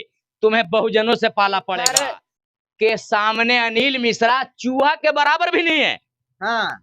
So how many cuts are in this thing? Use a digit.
1